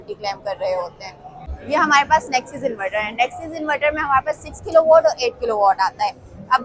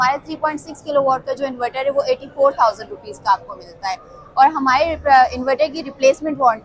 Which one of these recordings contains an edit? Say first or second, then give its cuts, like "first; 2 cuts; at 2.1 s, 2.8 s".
first; 1 cut; at 1.5 s